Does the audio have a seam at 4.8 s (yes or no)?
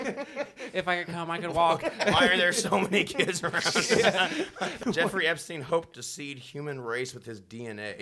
yes